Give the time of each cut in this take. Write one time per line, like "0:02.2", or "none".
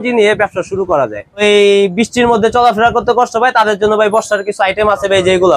0:01.4